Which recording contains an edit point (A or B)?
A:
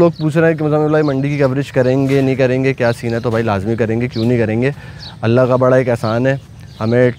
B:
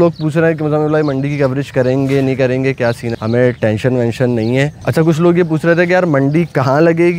B